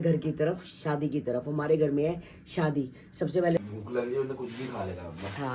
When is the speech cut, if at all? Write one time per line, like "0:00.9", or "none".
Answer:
0:03.6